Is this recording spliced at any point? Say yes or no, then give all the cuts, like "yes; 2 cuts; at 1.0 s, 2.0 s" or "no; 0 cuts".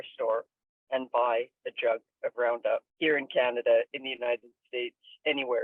yes; 1 cut; at 2.9 s